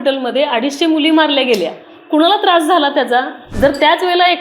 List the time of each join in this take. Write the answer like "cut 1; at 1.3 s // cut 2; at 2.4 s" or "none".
cut 1; at 3.4 s